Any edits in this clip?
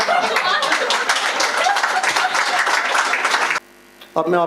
yes; 1 cut; at 3.6 s

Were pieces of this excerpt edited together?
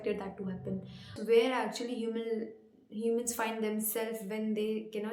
yes; 1 cut; at 1.2 s

